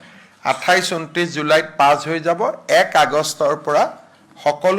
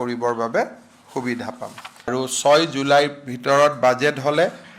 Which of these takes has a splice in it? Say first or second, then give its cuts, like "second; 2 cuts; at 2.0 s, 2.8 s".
second; 1 cut; at 2.1 s